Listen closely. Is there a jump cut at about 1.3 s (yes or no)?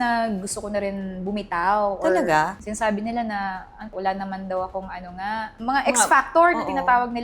no